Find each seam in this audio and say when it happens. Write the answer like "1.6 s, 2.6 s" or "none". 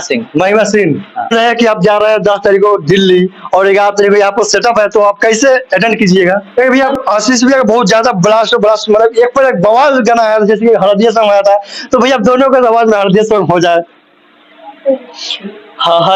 1.3 s, 6.5 s

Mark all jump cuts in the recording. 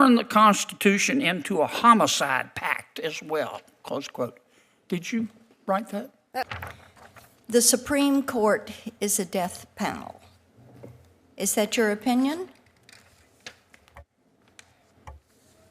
6.5 s

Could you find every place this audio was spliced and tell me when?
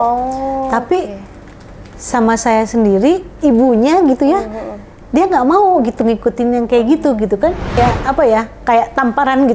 7.8 s

